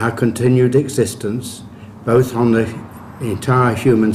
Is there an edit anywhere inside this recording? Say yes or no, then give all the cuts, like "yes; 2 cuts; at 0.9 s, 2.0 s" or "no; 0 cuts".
yes; 1 cut; at 1.4 s